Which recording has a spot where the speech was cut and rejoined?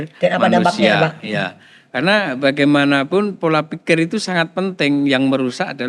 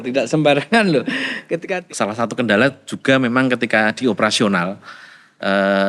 second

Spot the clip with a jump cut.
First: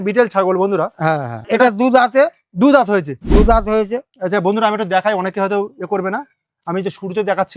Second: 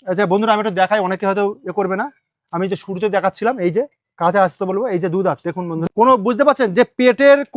second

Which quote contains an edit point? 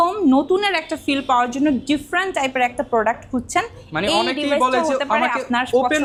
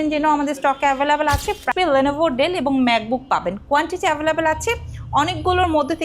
second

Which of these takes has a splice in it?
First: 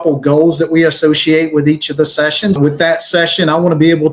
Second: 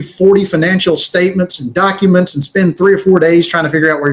first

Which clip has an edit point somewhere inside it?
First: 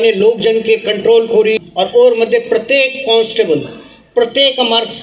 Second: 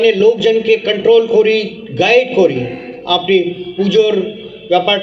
first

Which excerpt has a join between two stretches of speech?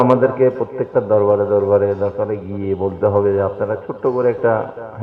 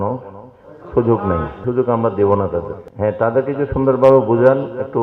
second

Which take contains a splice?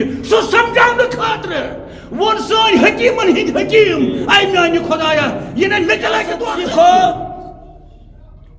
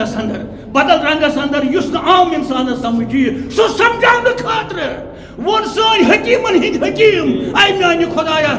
first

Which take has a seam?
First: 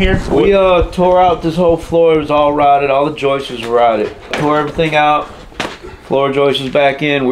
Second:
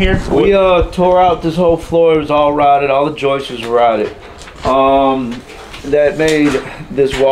first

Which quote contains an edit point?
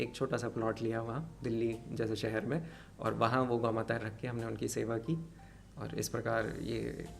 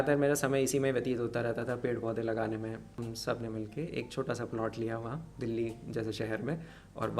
second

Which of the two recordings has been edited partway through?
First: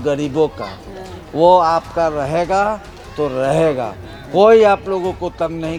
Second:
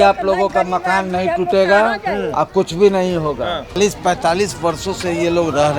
second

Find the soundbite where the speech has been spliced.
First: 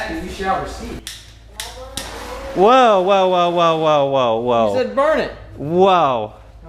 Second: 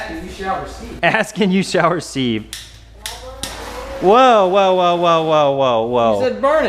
first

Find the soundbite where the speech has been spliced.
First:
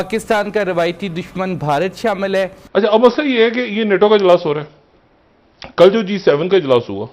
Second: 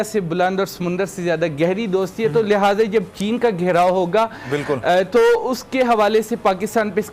first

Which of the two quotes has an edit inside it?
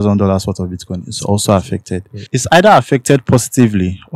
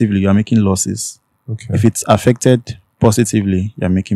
first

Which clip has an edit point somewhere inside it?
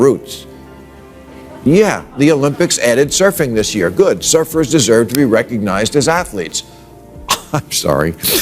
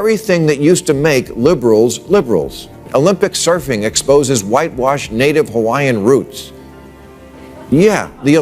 second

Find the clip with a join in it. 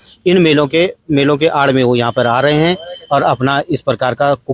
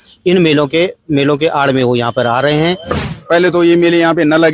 second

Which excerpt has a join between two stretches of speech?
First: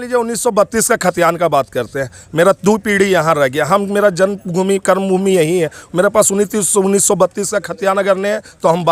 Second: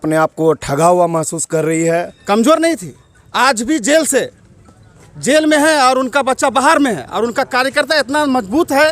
second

